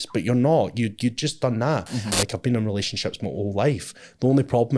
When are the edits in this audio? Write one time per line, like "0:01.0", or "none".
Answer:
0:02.2

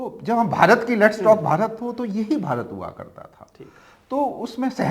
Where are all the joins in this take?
none

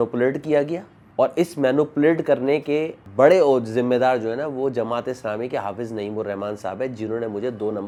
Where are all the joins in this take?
none

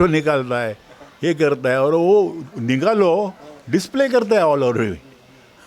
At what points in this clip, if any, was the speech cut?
none

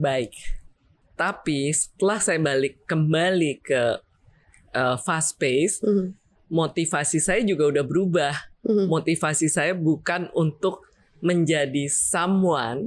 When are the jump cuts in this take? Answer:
0:01.0

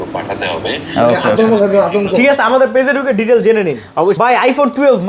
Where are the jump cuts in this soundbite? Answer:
0:04.2

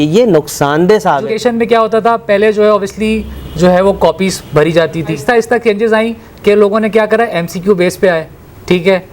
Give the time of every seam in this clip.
0:01.3
0:05.3

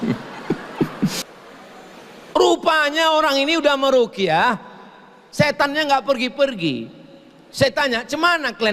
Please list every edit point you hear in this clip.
0:01.3

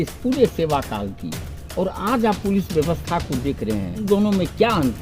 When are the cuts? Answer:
0:04.0

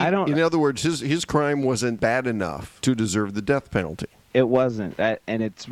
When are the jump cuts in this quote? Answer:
0:02.1
0:04.3

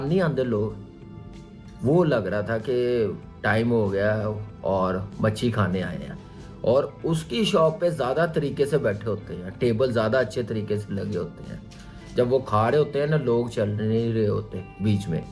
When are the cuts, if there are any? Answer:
none

